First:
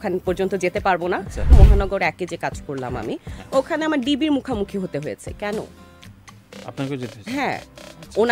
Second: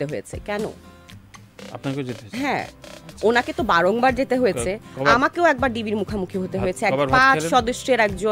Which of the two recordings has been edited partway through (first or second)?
first